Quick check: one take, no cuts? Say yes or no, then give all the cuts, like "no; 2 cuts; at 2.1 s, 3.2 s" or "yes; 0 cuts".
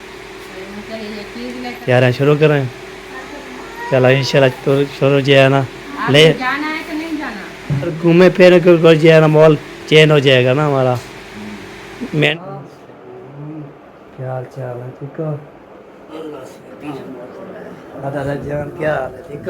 no; 4 cuts; at 1.8 s, 8.0 s, 12.3 s, 16.6 s